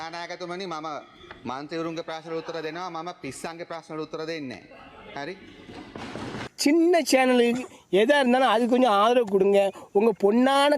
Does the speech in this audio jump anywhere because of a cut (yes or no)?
yes